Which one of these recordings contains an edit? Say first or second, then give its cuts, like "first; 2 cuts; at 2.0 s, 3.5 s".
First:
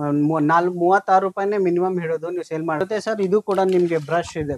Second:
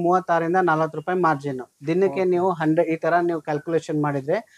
first; 1 cut; at 2.8 s